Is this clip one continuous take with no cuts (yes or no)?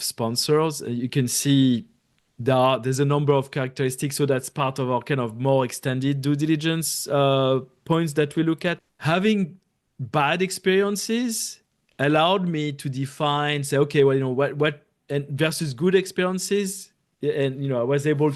no